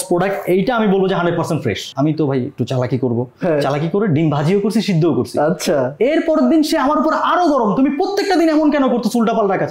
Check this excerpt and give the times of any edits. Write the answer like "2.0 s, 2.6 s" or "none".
1.9 s